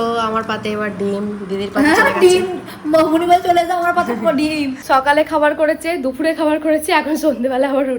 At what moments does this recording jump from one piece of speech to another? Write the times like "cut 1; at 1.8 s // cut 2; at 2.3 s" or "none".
cut 1; at 4.8 s